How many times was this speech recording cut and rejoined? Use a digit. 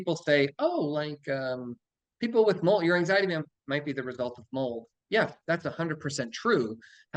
0